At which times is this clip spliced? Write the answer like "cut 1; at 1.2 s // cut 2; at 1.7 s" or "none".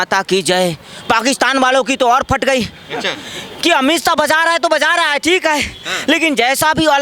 none